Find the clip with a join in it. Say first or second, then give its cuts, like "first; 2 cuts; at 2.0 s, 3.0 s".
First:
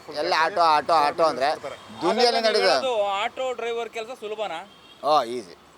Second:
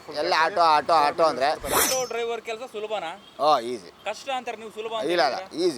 second; 3 cuts; at 1.8 s, 3.2 s, 3.9 s